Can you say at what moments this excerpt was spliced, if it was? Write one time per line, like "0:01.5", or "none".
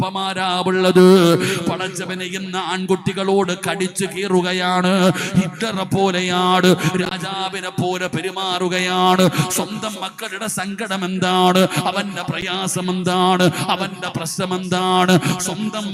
none